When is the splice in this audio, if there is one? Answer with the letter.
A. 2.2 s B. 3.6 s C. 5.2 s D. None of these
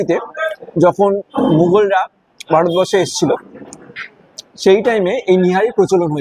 D